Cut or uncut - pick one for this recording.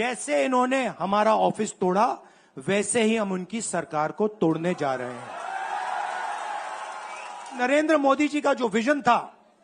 cut